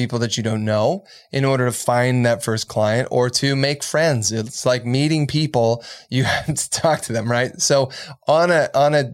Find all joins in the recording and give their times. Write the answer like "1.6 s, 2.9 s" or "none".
none

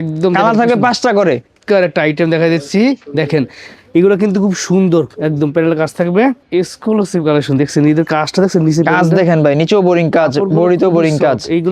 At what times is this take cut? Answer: 1.6 s, 6.4 s

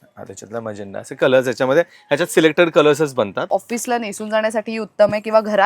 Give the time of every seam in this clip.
3.5 s

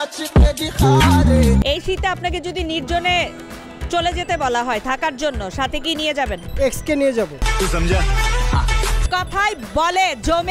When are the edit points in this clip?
1.6 s, 9.1 s

